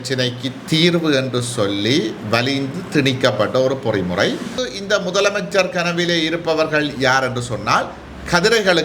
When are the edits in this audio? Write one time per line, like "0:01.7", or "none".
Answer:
0:04.6

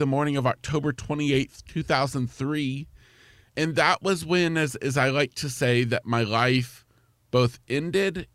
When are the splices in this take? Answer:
0:03.4

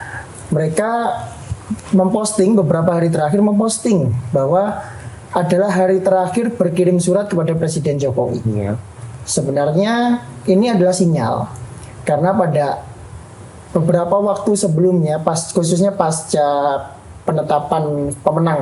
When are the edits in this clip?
none

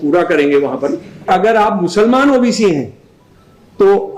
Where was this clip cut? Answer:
0:01.3

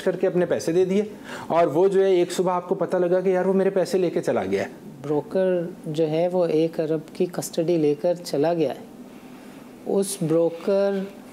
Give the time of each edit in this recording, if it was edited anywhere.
0:04.9

